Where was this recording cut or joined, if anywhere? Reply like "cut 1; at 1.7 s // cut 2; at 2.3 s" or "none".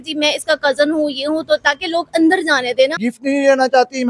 cut 1; at 3.1 s